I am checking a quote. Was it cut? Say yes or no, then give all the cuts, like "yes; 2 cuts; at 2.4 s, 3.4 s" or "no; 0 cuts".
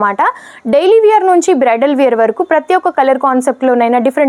no; 0 cuts